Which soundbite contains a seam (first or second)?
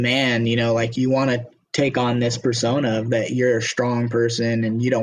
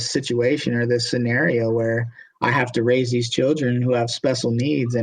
first